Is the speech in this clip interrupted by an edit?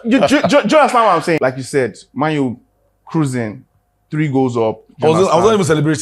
yes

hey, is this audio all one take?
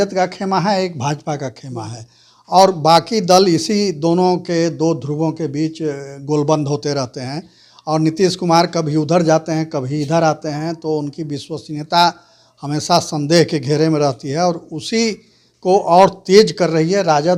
yes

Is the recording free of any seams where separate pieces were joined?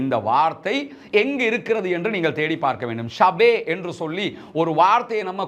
yes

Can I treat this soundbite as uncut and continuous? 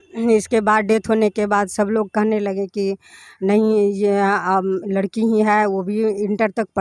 yes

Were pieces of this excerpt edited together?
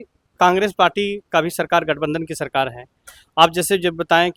no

